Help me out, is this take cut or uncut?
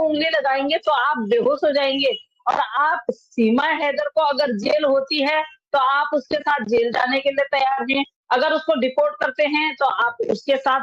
uncut